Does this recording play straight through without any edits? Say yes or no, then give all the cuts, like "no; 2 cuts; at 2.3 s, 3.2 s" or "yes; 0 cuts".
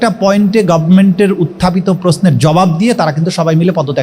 yes; 0 cuts